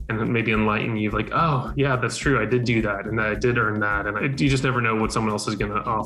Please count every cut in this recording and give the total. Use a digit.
1